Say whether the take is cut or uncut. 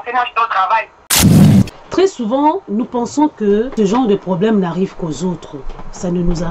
cut